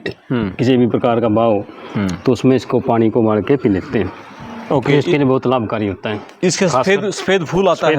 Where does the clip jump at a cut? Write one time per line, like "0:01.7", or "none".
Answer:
none